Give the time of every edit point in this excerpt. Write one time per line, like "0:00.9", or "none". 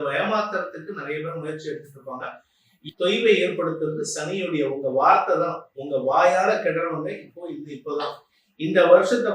0:02.7
0:08.3